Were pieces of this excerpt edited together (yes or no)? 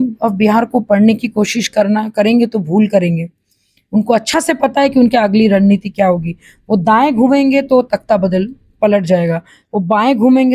no